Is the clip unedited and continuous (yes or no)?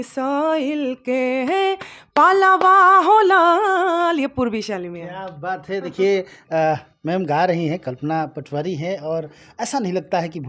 yes